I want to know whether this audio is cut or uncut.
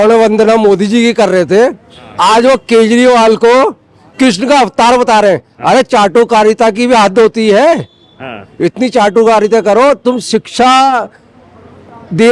uncut